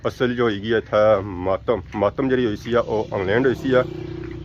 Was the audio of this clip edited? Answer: no; 0 cuts

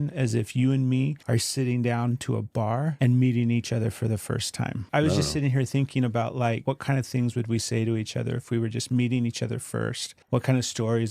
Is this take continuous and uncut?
no; 5 cuts; at 1.2 s, 2.9 s, 4.9 s, 6.6 s, 10.1 s

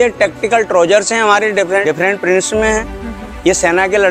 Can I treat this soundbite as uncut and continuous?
no; 1 cut; at 1.8 s

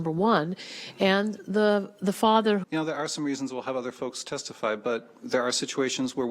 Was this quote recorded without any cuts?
no; 1 cut; at 2.6 s

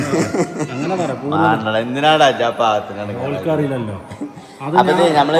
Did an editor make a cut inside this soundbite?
no; 0 cuts

